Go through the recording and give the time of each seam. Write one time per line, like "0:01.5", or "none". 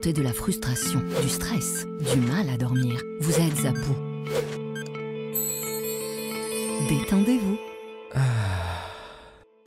none